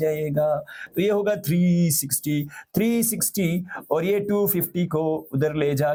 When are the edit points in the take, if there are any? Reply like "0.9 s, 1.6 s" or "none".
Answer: none